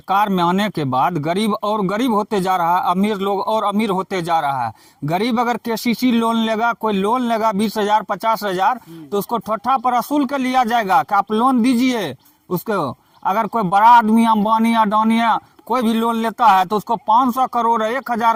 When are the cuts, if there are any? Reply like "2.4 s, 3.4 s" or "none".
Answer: none